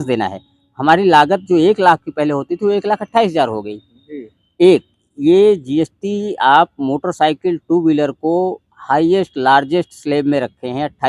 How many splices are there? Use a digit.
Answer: 0